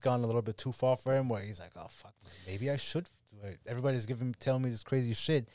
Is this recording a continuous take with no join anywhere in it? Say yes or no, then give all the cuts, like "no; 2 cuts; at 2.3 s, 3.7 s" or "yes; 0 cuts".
yes; 0 cuts